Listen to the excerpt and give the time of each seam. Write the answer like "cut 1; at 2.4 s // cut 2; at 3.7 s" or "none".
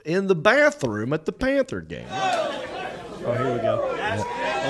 cut 1; at 2.0 s